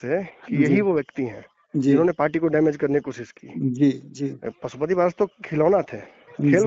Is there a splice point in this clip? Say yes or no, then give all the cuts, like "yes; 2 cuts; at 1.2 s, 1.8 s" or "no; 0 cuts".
no; 0 cuts